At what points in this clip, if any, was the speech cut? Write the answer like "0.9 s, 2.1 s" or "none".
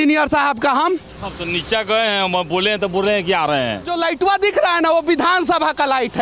3.9 s